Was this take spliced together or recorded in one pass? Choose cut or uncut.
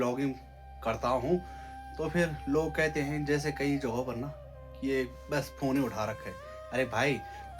uncut